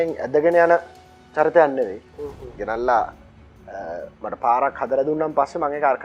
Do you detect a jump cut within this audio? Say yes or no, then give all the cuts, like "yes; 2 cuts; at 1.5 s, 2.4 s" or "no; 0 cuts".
no; 0 cuts